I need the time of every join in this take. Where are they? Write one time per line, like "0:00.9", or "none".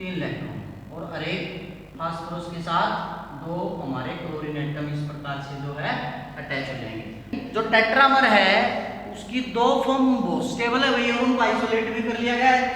0:07.3